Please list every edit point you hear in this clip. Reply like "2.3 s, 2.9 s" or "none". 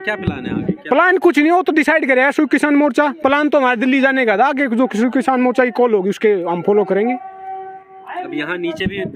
none